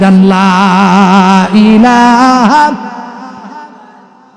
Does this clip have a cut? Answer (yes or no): no